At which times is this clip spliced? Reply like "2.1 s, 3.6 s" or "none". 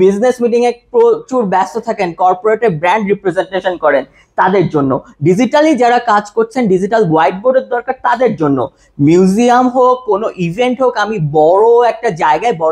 none